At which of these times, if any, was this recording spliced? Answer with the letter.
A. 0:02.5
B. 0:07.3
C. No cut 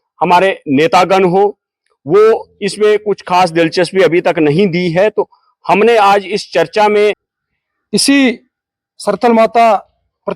B